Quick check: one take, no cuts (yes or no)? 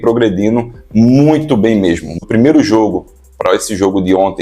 no